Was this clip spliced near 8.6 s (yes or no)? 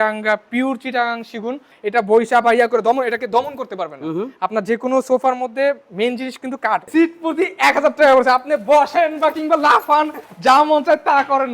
no